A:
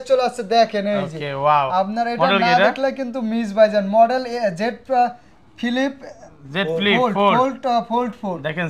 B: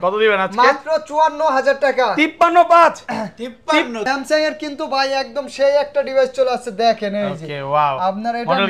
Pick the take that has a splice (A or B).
B